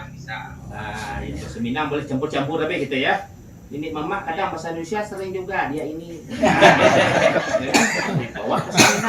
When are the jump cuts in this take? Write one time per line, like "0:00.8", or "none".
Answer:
none